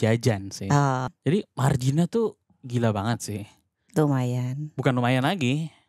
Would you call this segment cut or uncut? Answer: cut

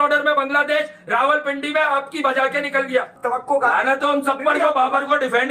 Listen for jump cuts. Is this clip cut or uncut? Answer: uncut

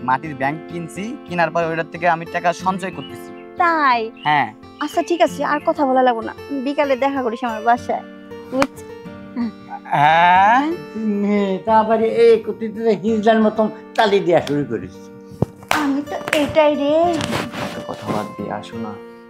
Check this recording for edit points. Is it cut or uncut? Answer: cut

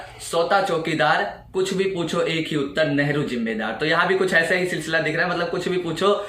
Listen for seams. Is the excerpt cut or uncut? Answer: uncut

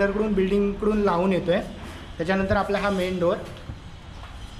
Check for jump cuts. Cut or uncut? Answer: uncut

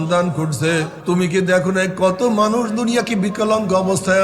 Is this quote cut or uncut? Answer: cut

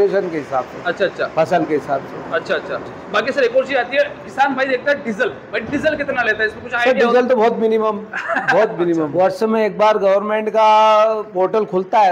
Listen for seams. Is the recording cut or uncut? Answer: cut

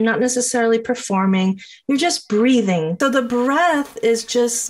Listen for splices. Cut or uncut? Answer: cut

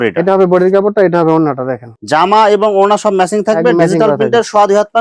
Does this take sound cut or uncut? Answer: uncut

